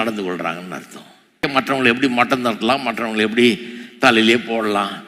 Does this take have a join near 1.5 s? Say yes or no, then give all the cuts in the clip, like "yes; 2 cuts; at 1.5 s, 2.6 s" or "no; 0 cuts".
yes; 1 cut; at 1.5 s